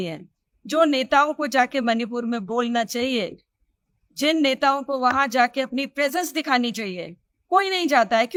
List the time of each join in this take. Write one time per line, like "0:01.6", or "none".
none